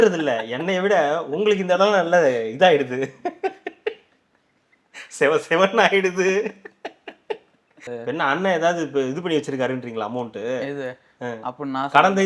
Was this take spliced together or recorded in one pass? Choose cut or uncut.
cut